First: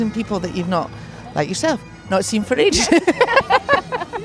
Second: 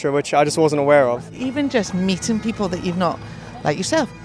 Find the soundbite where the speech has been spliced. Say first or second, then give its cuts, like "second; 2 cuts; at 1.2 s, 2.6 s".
second; 1 cut; at 1.4 s